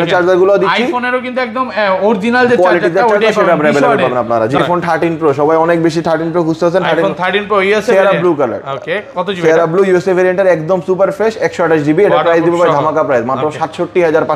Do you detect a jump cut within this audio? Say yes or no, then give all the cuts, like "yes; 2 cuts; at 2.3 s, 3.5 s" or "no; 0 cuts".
yes; 1 cut; at 4.6 s